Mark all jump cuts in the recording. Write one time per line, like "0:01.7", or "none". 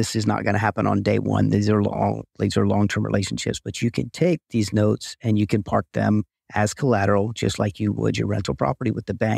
none